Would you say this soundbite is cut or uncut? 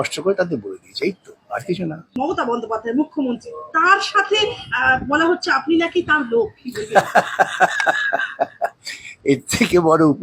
cut